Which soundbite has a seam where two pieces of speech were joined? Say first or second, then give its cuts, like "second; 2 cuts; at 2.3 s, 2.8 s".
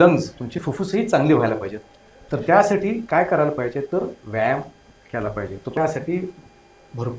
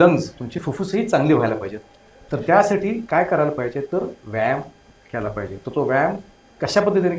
first; 1 cut; at 5.8 s